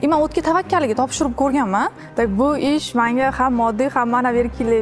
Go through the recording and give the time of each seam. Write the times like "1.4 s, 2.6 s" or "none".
2.0 s